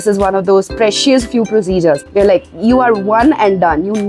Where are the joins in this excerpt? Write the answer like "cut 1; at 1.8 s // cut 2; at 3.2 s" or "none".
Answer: cut 1; at 2.1 s